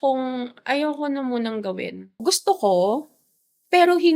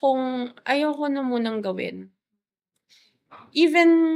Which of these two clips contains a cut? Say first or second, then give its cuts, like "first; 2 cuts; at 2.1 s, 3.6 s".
first; 1 cut; at 2.1 s